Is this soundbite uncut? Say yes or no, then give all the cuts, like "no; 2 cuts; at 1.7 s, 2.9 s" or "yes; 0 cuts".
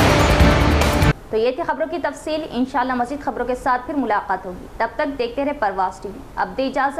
yes; 0 cuts